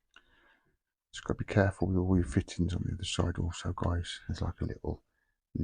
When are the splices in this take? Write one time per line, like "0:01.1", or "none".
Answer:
0:04.1